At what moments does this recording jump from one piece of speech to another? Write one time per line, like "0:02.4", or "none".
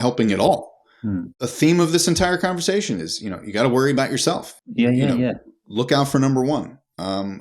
0:01.3
0:04.5